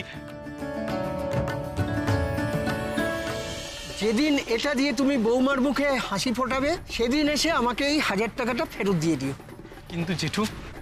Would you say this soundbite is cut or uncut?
cut